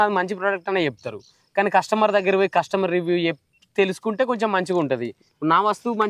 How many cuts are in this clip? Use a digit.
0